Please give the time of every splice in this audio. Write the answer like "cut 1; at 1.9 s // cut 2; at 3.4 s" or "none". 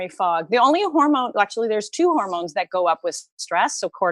none